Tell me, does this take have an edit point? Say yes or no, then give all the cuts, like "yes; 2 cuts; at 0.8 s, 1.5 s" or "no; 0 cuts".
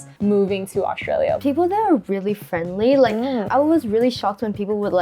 yes; 1 cut; at 1.4 s